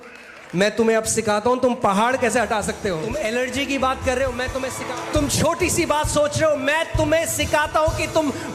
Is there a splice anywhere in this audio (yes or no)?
yes